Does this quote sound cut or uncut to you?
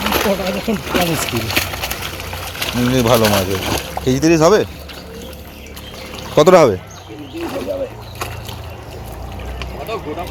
uncut